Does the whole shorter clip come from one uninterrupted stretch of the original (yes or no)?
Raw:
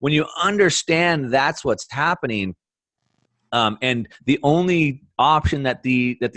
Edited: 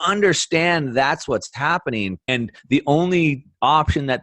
no